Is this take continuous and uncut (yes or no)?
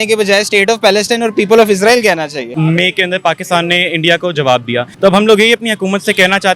no